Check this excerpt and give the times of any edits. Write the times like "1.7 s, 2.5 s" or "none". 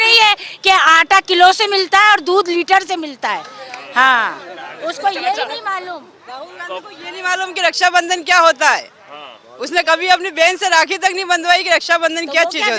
none